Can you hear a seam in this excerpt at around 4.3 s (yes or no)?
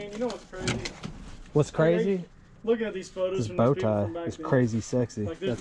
no